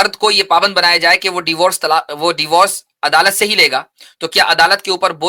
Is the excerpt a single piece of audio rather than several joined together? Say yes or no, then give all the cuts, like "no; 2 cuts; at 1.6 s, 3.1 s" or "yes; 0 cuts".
yes; 0 cuts